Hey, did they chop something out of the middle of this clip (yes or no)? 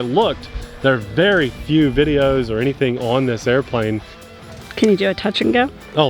yes